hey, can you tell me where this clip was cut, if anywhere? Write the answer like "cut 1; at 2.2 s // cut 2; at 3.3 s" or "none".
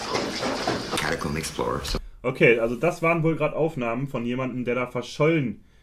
cut 1; at 1.0 s